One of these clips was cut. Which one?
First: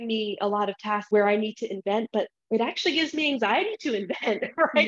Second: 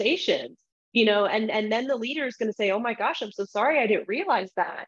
first; 1 cut; at 1.1 s

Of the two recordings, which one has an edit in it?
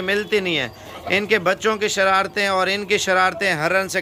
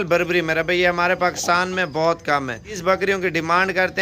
second; 1 cut; at 2.8 s

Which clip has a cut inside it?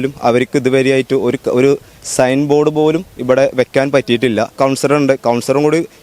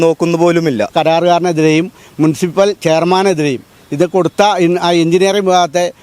second; 1 cut; at 0.9 s

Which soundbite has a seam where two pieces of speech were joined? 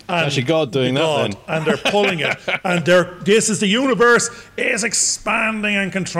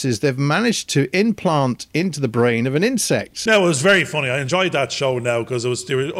second; 1 cut; at 3.3 s

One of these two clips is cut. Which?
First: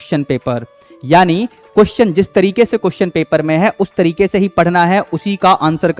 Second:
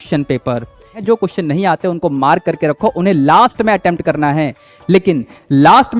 second; 1 cut; at 1.0 s

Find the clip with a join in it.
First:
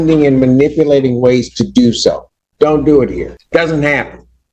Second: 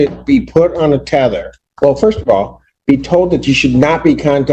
first; 1 cut; at 3.4 s

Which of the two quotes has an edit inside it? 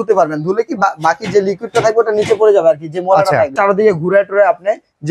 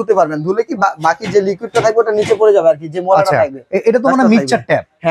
first; 1 cut; at 3.5 s

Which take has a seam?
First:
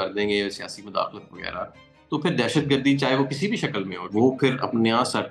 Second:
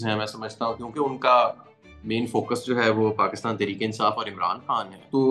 first; 1 cut; at 4.1 s

